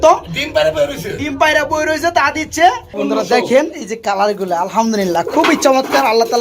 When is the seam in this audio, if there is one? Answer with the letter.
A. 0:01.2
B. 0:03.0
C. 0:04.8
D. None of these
B